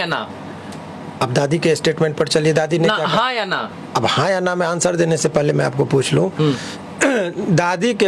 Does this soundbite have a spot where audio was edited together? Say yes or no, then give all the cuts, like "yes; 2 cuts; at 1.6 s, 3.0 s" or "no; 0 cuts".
no; 0 cuts